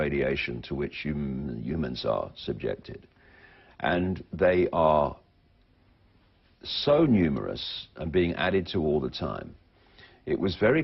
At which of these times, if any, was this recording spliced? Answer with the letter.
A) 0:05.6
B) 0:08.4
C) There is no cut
B